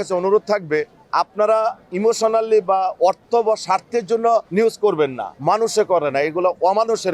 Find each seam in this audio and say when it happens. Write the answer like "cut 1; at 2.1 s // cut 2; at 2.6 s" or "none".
cut 1; at 1.0 s // cut 2; at 4.5 s // cut 3; at 5.3 s